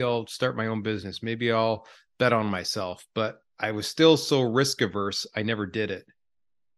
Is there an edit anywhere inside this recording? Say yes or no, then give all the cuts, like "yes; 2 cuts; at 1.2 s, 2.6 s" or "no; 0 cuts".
no; 0 cuts